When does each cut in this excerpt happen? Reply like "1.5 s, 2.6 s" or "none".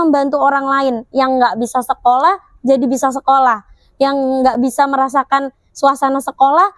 none